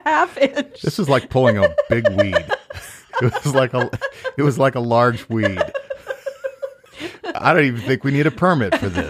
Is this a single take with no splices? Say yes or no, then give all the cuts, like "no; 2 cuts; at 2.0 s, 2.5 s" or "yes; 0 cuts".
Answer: no; 1 cut; at 6.8 s